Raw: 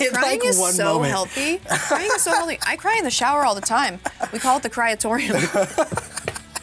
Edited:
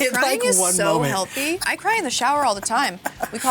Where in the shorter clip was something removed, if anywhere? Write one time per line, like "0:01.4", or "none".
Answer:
0:01.6